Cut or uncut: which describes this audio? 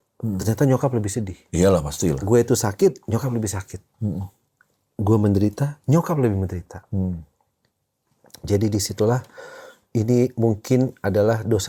uncut